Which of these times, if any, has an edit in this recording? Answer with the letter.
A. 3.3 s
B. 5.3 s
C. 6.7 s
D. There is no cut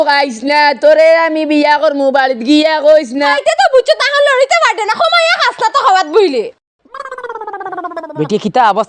A